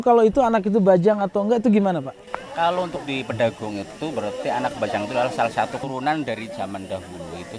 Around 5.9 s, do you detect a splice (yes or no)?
yes